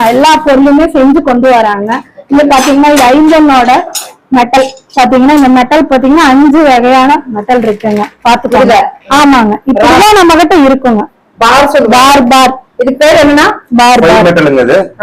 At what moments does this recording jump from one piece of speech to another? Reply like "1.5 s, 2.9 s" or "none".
none

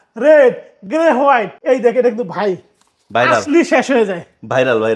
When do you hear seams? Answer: 1.5 s

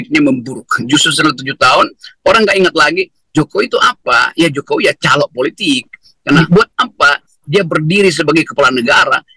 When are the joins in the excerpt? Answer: 6.4 s

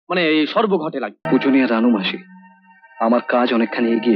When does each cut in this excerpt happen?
1.2 s

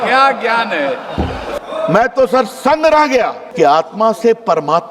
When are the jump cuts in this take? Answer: 1.5 s, 3.4 s

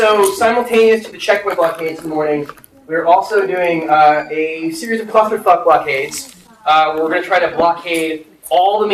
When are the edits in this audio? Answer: none

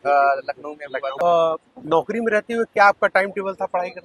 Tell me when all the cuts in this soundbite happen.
1.1 s

